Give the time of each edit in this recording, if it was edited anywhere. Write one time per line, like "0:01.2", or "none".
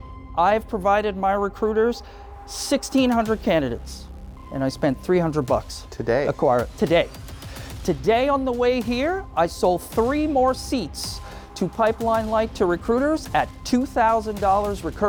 none